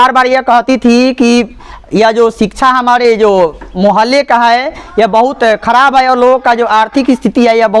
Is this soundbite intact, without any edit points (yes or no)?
yes